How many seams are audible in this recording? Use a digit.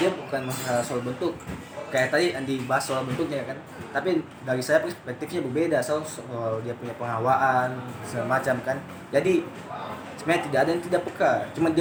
0